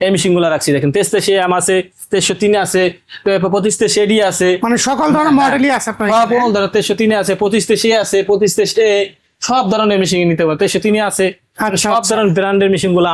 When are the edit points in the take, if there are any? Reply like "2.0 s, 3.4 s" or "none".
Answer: none